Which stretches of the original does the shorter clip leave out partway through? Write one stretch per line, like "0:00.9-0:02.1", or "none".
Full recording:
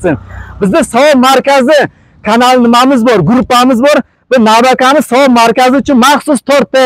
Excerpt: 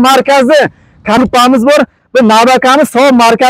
0:02.4-0:03.4